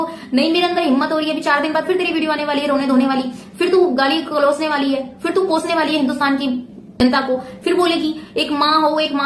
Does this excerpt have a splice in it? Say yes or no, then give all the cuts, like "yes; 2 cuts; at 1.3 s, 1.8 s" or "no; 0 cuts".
no; 0 cuts